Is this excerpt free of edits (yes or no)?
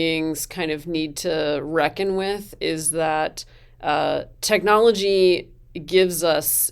yes